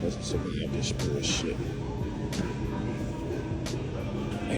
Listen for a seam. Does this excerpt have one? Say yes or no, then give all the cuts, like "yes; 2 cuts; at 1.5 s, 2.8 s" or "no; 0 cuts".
no; 0 cuts